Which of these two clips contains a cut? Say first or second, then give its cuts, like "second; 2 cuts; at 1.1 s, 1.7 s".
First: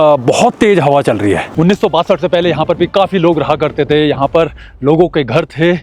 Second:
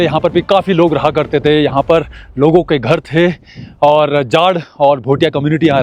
first; 1 cut; at 1.5 s